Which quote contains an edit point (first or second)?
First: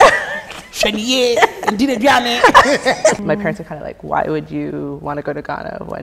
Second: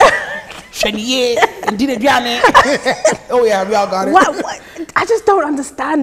first